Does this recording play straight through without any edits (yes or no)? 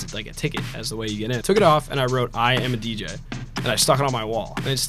no